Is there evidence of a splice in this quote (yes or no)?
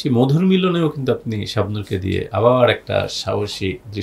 no